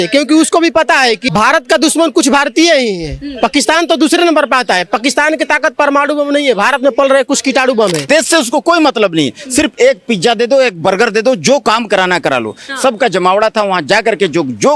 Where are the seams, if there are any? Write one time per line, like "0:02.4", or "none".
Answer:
0:01.2
0:08.0